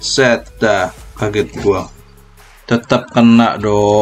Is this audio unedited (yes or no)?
yes